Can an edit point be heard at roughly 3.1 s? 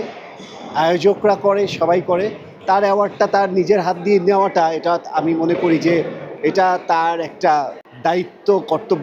no; 1 cut; at 7.8 s

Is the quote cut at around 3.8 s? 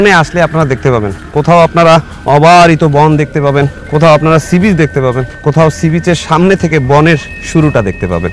yes; 3 cuts; at 2.1 s, 3.8 s, 7.4 s

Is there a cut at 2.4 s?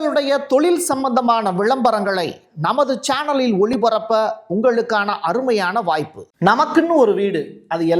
no; 1 cut; at 6.2 s

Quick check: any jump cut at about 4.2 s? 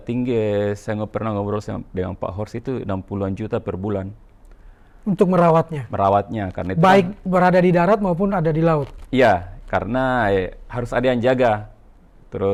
no; 0 cuts

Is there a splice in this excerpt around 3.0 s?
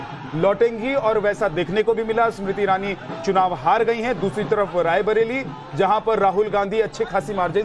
no; 1 cut; at 6.2 s

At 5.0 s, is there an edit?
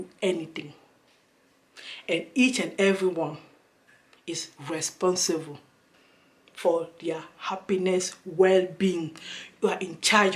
no; 0 cuts

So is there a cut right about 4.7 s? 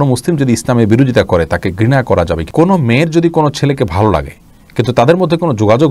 no; 1 cut; at 2.5 s

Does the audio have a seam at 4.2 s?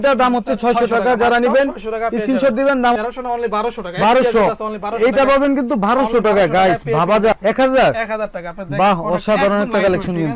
no; 2 cuts; at 3.0 s, 7.3 s

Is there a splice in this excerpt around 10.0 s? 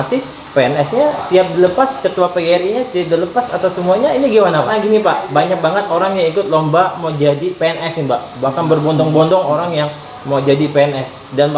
no; 1 cut; at 4.7 s

